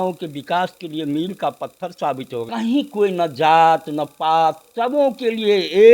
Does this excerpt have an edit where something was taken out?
yes; 1 cut; at 2.5 s

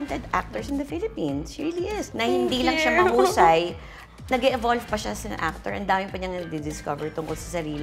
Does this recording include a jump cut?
yes; 1 cut; at 2.1 s

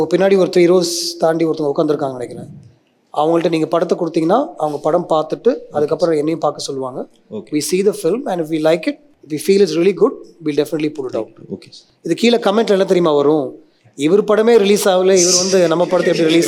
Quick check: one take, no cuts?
yes; 0 cuts

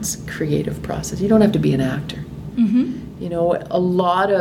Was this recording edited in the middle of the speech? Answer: no; 0 cuts

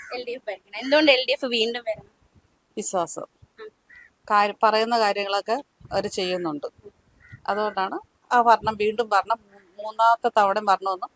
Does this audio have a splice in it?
no; 0 cuts

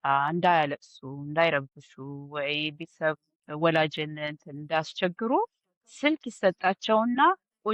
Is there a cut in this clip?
no; 0 cuts

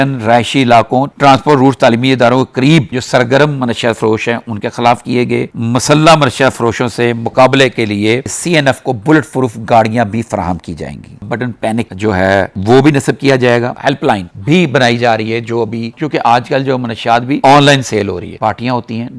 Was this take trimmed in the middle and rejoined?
yes; 5 cuts; at 5.5 s, 11.2 s, 13.8 s, 15.9 s, 18.3 s

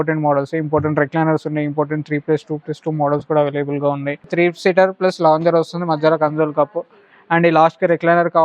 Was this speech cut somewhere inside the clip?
yes; 1 cut; at 4.3 s

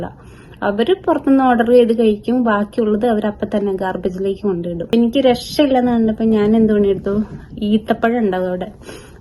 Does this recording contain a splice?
yes; 1 cut; at 4.9 s

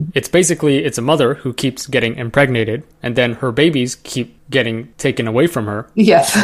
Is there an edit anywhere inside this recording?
no; 0 cuts

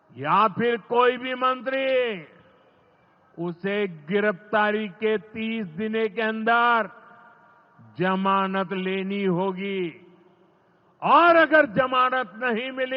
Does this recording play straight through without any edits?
yes; 0 cuts

